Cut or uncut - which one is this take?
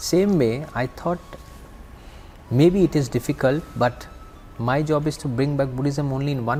uncut